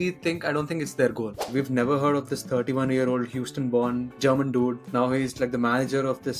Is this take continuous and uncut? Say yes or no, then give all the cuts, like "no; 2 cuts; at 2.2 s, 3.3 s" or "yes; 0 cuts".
no; 1 cut; at 1.5 s